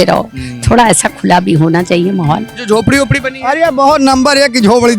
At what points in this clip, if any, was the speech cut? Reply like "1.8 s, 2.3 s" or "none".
2.5 s